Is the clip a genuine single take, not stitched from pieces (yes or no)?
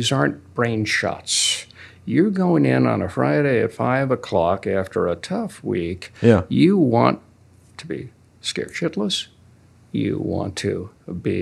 yes